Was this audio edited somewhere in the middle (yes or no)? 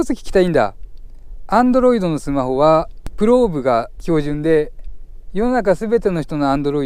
yes